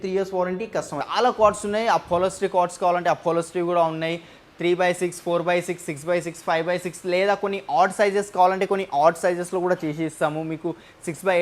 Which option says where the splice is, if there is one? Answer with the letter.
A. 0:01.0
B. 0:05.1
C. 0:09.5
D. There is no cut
A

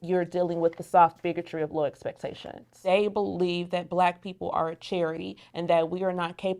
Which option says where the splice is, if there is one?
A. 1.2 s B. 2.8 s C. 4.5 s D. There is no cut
B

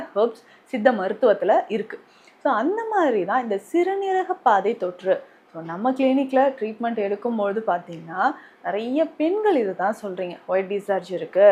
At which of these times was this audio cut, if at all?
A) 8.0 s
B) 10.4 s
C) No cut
C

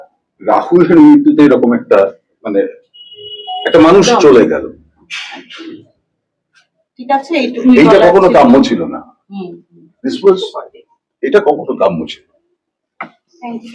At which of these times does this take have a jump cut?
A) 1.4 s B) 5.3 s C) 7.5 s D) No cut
D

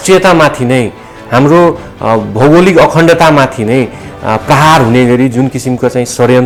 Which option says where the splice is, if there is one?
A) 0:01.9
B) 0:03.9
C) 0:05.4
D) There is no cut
D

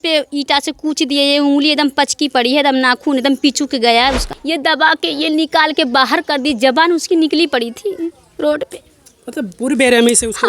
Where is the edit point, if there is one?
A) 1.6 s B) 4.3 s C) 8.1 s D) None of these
B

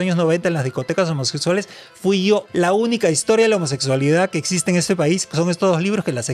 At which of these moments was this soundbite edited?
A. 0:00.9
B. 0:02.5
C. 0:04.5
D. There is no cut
B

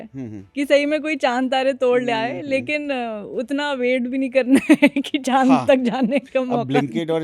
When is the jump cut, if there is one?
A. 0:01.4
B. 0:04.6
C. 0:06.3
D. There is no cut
D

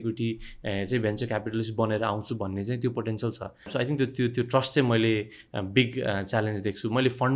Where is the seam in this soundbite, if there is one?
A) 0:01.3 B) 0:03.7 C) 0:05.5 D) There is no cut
B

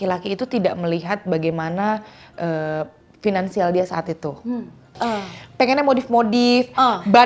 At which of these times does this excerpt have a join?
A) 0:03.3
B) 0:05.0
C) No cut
B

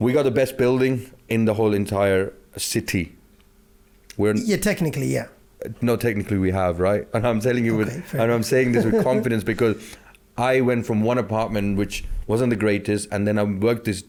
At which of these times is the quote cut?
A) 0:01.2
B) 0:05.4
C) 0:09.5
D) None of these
D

